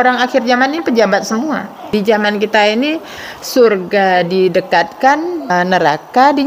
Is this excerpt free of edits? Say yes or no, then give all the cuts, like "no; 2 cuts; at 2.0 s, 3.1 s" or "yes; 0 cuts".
no; 2 cuts; at 1.9 s, 5.5 s